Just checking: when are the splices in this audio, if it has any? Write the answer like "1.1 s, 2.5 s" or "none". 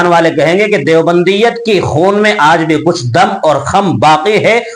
none